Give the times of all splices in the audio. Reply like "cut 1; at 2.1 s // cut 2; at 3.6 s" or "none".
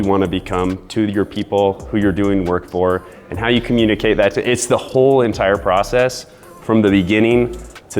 none

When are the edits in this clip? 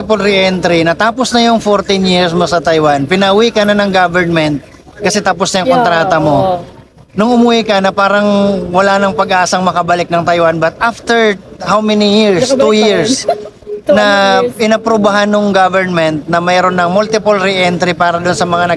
none

